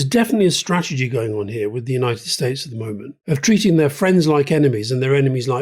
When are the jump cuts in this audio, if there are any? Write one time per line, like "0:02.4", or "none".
0:03.1